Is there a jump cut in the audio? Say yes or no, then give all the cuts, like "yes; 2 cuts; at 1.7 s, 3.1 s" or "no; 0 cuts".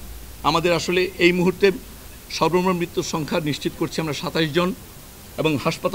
no; 0 cuts